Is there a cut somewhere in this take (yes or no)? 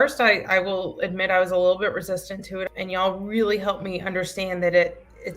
yes